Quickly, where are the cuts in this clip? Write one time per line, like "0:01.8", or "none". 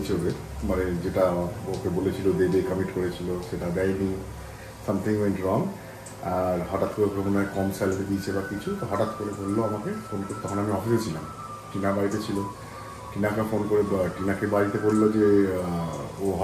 none